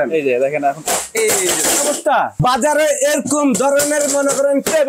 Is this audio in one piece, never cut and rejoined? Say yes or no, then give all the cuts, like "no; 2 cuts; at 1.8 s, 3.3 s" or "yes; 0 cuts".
no; 1 cut; at 2.3 s